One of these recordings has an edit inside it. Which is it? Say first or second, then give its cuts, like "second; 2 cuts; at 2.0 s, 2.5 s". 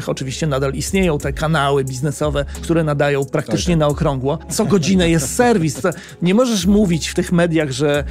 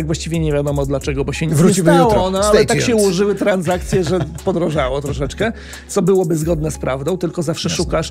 first; 2 cuts; at 2.5 s, 4.5 s